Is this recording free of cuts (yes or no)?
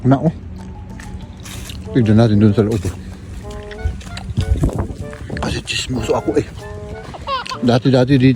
yes